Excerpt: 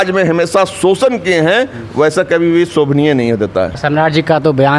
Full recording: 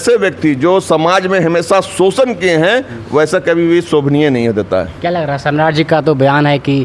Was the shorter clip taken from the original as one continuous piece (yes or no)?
no